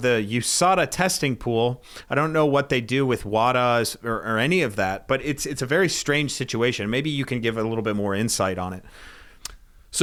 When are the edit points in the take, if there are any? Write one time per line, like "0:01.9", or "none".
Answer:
none